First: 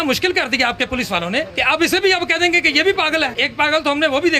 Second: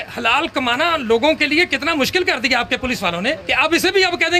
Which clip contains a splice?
first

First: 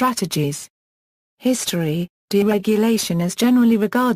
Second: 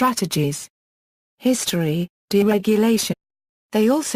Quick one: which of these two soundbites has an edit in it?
first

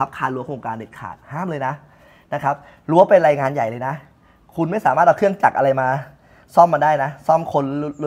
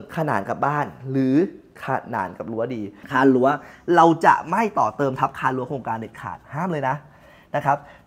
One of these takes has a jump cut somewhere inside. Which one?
second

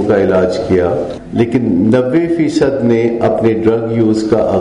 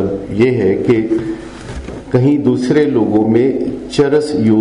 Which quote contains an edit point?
first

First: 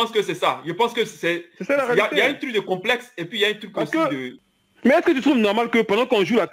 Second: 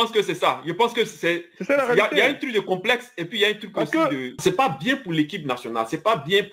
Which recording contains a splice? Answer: second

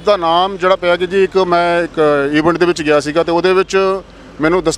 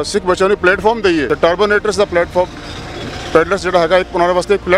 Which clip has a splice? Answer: second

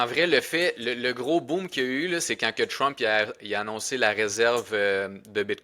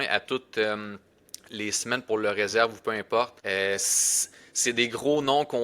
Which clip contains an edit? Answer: second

